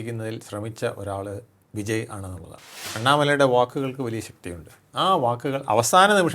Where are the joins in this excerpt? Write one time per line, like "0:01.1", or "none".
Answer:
0:02.8